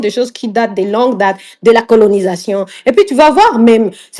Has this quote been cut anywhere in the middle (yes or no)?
no